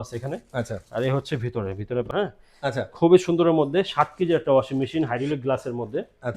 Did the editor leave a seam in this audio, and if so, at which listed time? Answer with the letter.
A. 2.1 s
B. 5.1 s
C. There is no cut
A